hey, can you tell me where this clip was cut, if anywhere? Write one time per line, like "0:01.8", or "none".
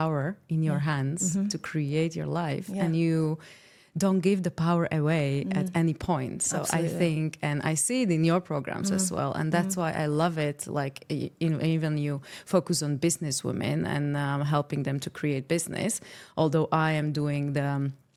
none